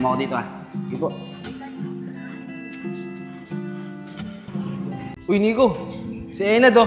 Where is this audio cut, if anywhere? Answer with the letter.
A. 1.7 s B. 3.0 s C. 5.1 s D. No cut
C